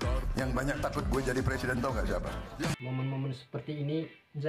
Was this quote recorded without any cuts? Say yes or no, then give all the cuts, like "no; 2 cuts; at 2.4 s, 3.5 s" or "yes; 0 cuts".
no; 1 cut; at 2.8 s